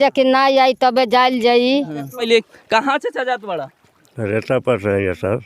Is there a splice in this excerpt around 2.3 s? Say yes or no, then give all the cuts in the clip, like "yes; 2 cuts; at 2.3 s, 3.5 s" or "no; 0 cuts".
yes; 1 cut; at 2.3 s